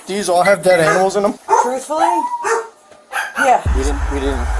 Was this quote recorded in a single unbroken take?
no; 2 cuts; at 1.4 s, 3.6 s

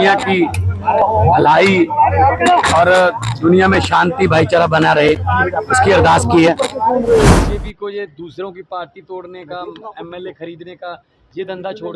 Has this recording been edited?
yes; 1 cut; at 7.3 s

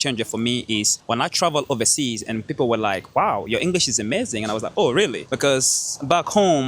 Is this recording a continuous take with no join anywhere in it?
no; 2 cuts; at 1.0 s, 5.2 s

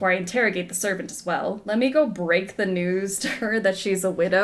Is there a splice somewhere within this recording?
yes; 1 cut; at 1.6 s

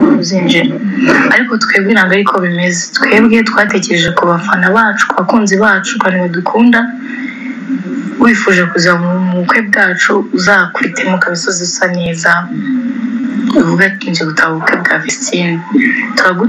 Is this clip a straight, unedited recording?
yes; 0 cuts

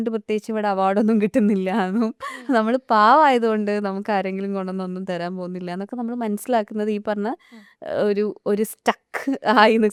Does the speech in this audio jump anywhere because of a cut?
no; 0 cuts

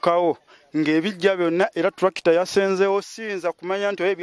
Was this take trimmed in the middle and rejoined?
no; 0 cuts

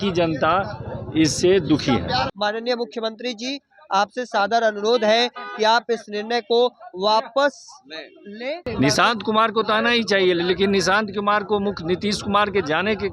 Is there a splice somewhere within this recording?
yes; 2 cuts; at 2.3 s, 8.7 s

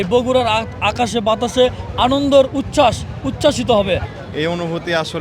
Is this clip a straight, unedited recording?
no; 1 cut; at 4.0 s

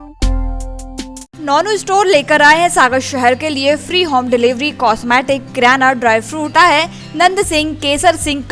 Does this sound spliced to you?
yes; 2 cuts; at 1.3 s, 6.5 s

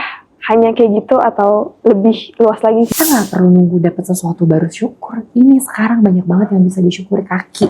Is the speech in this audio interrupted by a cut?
yes; 1 cut; at 2.9 s

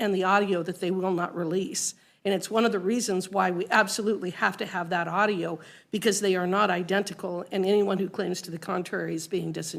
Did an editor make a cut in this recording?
no; 0 cuts

